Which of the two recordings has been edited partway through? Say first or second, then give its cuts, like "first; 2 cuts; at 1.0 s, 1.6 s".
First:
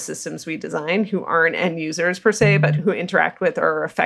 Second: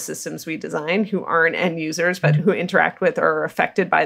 second; 1 cut; at 2.2 s